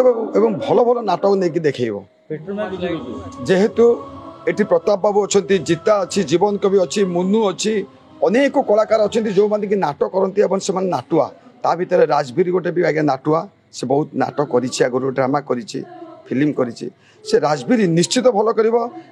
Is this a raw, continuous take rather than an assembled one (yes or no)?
no